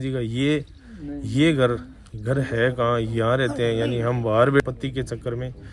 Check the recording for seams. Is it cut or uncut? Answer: cut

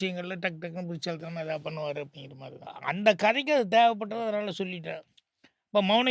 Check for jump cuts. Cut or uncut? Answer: cut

